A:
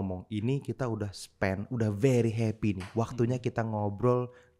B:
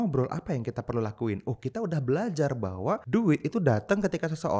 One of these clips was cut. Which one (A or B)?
B